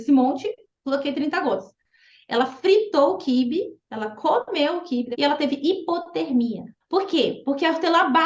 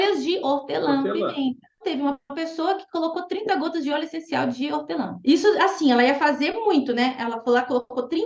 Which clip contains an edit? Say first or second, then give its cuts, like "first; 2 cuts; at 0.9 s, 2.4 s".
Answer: first; 2 cuts; at 5.1 s, 6.7 s